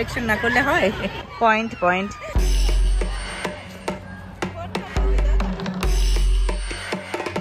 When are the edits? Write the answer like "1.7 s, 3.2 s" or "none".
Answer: none